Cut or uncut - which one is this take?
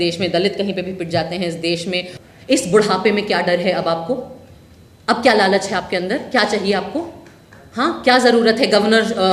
cut